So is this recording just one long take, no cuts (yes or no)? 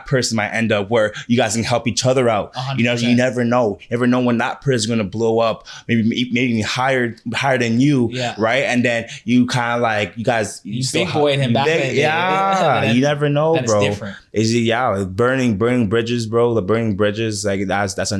yes